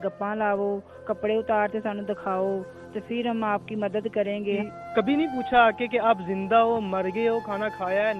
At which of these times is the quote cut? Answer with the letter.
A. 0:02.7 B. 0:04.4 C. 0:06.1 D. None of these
B